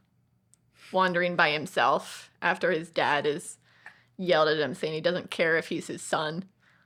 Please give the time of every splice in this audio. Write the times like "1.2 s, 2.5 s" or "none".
none